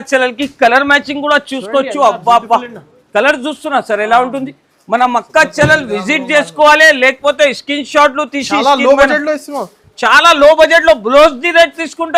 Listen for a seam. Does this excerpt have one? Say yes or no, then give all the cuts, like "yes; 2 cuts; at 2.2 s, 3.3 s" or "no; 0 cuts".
no; 0 cuts